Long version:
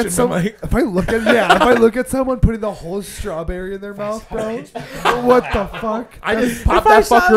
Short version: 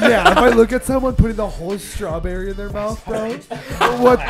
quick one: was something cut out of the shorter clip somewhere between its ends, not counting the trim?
no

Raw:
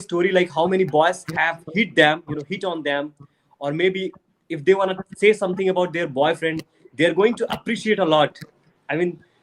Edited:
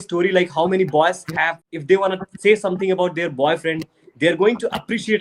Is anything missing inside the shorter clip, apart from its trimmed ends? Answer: yes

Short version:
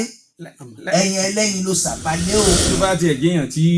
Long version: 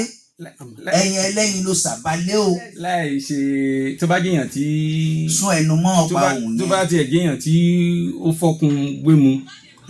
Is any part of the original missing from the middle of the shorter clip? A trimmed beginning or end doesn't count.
yes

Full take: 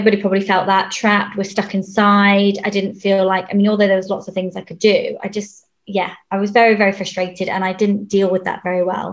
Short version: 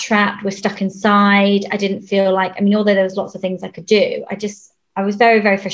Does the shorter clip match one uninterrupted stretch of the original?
no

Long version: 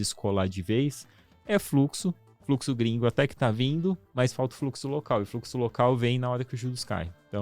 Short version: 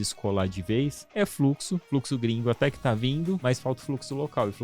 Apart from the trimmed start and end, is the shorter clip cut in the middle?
yes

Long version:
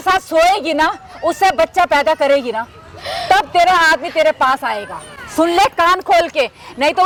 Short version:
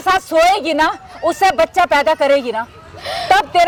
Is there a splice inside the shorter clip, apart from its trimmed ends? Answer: no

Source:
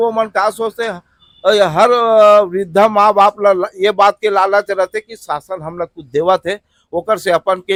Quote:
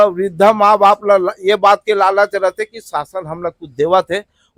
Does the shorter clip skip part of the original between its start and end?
no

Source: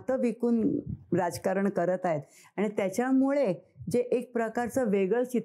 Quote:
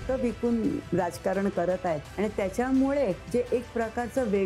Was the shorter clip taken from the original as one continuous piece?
no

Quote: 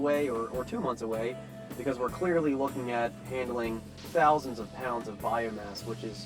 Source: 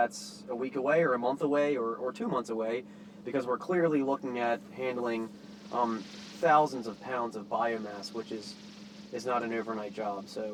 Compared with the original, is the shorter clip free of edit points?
no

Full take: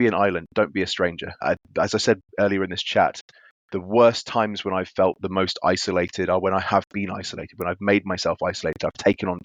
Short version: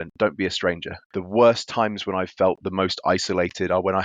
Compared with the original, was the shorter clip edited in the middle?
yes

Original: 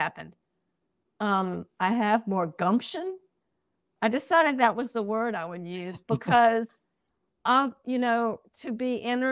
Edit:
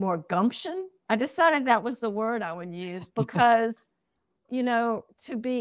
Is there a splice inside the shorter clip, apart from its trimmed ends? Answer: yes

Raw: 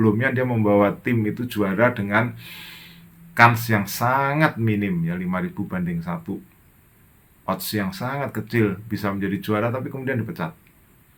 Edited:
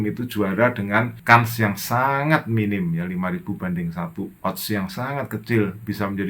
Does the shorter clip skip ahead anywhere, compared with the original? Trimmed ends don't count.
yes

